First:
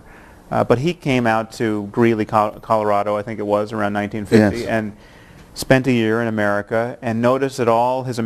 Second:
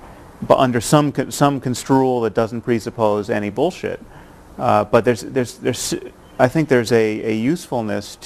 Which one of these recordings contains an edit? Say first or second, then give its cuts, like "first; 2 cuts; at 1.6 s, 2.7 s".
second; 1 cut; at 2.3 s